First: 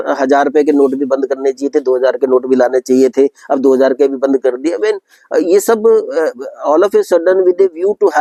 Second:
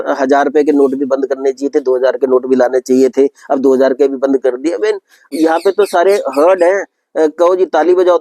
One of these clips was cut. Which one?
second; 1 cut; at 5.3 s

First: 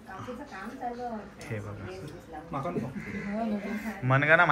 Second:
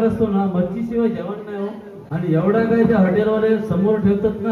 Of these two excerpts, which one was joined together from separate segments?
second; 1 cut; at 1.9 s

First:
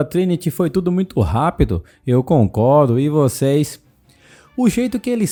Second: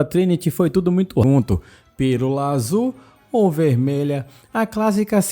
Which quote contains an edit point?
second; 1 cut; at 1.2 s

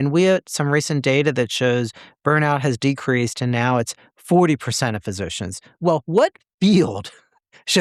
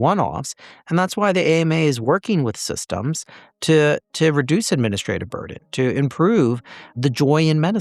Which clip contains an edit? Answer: second; 1 cut; at 6.9 s

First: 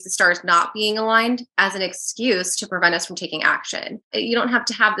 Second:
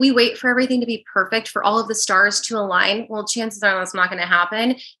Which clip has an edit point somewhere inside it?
first; 1 cut; at 4.1 s

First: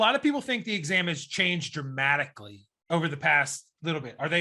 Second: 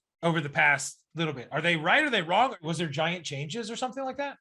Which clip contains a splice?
second; 1 cut; at 2.7 s

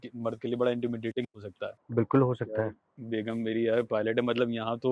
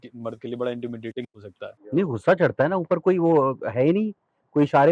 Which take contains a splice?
second; 1 cut; at 1.9 s

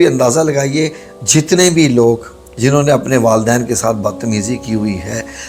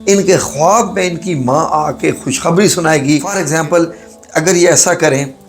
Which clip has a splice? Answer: second; 1 cut; at 3.3 s

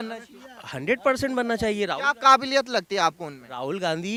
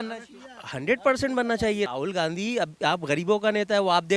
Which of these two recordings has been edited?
second; 1 cut; at 1.9 s

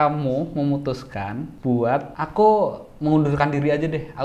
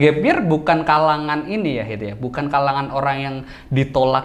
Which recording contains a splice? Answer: first; 2 cuts; at 1.5 s, 2.2 s

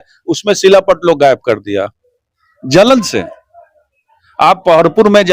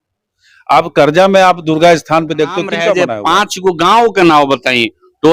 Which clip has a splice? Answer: second; 1 cut; at 2.9 s

